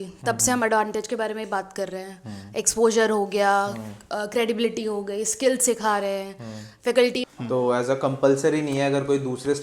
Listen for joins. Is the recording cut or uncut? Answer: cut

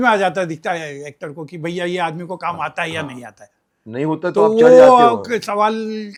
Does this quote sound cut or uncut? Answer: uncut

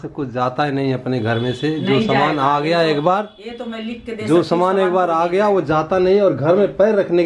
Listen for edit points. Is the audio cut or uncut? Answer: uncut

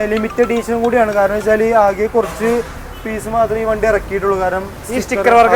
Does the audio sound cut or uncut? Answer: uncut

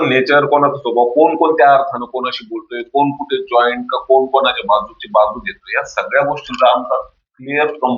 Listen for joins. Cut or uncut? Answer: uncut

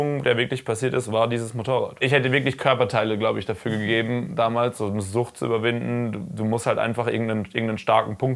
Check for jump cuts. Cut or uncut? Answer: cut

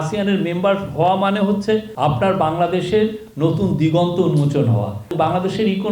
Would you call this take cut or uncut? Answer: cut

